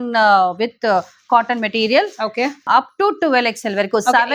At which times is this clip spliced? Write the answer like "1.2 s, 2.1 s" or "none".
2.7 s